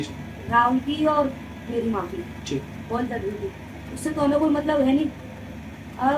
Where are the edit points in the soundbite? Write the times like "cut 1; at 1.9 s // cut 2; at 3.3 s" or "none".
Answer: none